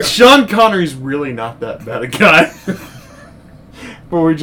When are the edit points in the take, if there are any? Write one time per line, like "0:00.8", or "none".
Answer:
none